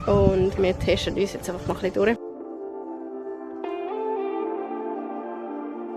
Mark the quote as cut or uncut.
uncut